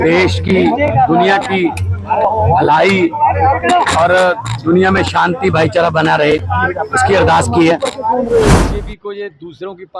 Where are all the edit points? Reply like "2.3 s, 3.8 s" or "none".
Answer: 8.5 s

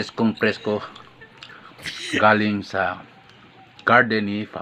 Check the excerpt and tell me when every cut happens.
none

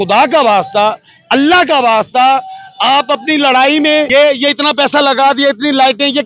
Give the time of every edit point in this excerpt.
4.1 s

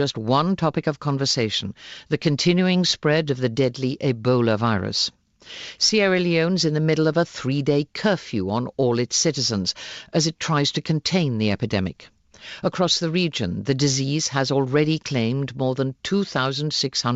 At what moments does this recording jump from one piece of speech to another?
7.0 s

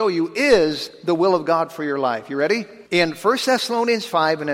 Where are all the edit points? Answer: 2.7 s

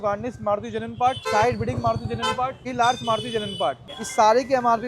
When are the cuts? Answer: 1.2 s, 2.6 s, 3.8 s

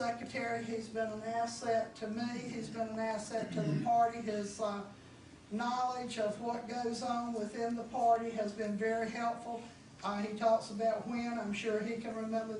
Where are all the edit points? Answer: 10.4 s

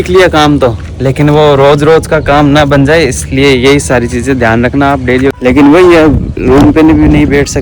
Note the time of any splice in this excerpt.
5.4 s

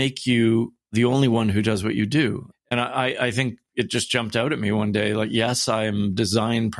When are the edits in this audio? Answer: 0.9 s, 2.5 s

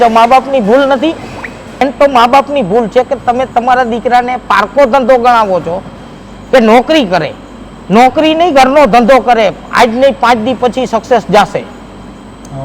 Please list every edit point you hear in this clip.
1.8 s

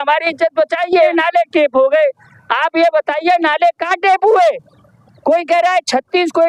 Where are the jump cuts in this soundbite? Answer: 1.1 s

